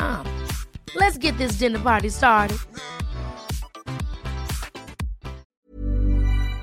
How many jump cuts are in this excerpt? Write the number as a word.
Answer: one